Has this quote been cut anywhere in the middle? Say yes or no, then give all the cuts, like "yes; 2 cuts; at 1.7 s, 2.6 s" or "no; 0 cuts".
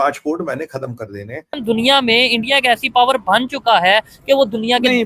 yes; 1 cut; at 1.6 s